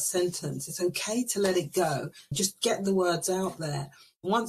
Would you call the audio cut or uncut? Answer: cut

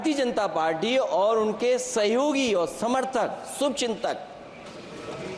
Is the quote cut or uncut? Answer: uncut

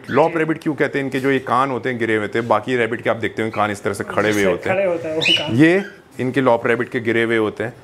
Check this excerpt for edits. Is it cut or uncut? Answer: uncut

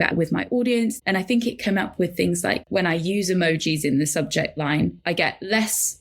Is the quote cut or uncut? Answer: cut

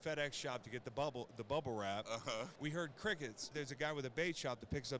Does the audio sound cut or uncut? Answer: cut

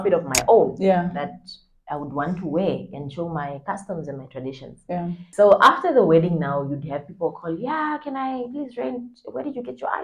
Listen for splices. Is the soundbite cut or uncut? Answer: cut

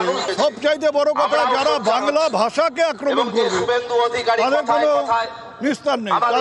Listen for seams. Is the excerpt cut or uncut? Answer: uncut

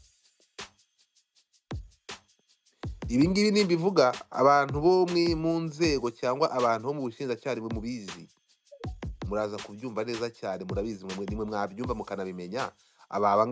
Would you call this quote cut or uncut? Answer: uncut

